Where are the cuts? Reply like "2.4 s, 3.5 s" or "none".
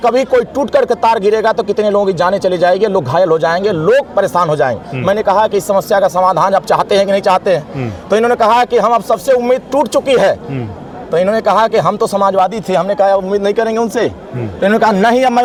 none

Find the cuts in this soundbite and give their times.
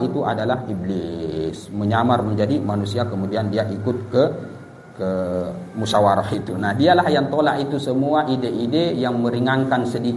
none

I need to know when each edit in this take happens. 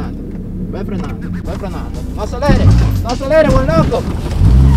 1.4 s

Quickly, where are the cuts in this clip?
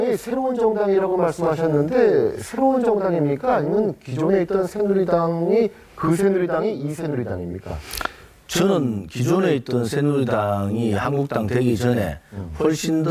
9.1 s

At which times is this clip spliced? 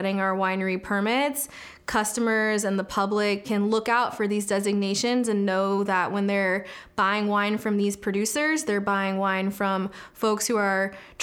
3.4 s

